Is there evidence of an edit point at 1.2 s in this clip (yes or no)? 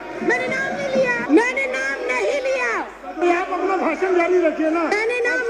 yes